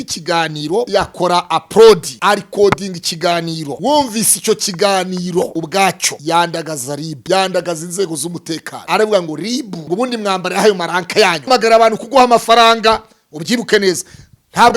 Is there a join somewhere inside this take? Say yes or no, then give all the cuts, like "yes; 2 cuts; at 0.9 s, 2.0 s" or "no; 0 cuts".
yes; 8 cuts; at 0.9 s, 2.1 s, 3.7 s, 5.6 s, 7.1 s, 8.7 s, 9.7 s, 11.5 s